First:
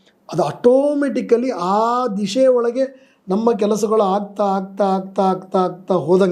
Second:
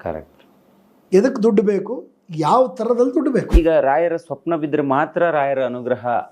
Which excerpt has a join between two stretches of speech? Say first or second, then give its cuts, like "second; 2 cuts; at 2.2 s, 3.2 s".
second; 1 cut; at 3.5 s